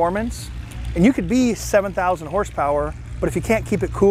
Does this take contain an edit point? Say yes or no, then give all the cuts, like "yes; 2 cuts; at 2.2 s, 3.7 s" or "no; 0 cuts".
no; 0 cuts